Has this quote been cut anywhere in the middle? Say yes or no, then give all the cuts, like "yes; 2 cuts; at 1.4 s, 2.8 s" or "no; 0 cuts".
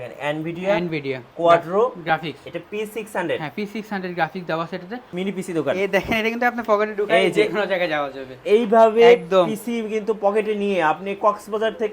yes; 1 cut; at 5.1 s